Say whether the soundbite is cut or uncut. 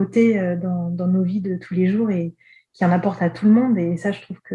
uncut